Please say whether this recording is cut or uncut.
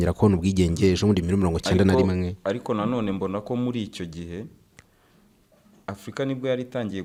uncut